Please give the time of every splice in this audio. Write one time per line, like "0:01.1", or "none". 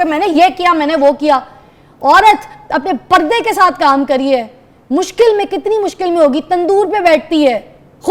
none